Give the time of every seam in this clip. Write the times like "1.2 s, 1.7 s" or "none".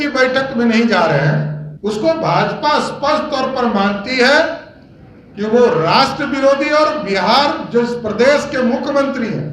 1.6 s